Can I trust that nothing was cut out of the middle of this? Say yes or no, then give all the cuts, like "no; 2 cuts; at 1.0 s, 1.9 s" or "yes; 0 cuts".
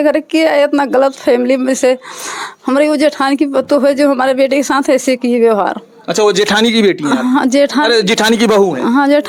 yes; 0 cuts